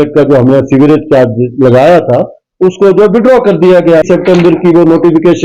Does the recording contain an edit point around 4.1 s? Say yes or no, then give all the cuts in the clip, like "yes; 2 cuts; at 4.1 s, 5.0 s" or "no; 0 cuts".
yes; 1 cut; at 4.1 s